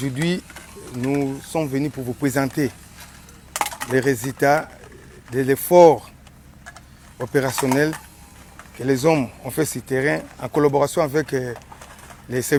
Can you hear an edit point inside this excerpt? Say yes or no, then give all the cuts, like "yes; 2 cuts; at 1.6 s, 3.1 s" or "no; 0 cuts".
no; 0 cuts